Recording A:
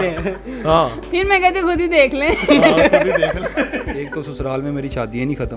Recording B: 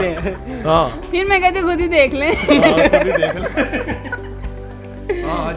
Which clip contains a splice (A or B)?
A